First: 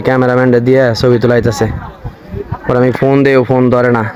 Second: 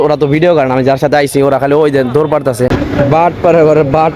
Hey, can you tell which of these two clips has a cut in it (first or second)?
second